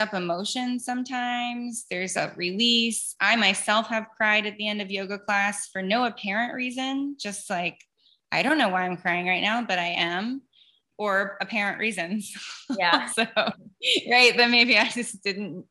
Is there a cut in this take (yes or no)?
no